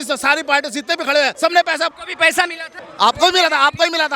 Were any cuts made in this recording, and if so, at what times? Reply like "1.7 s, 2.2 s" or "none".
1.3 s, 2.0 s

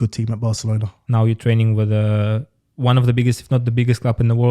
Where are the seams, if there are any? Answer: 0.9 s

